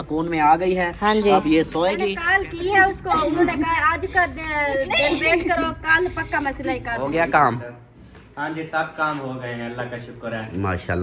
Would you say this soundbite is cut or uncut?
cut